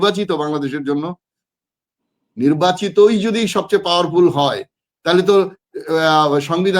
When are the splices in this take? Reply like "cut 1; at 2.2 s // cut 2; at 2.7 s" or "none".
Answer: none